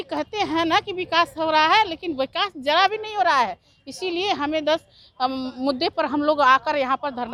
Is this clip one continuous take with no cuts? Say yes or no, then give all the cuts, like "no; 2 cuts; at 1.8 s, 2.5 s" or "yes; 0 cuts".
yes; 0 cuts